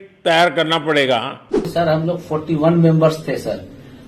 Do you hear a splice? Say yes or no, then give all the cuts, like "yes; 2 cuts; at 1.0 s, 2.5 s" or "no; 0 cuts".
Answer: yes; 1 cut; at 1.6 s